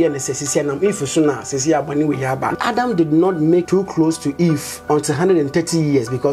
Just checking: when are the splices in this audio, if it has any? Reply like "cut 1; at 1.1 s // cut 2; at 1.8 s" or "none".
cut 1; at 2.5 s // cut 2; at 3.7 s // cut 3; at 4.7 s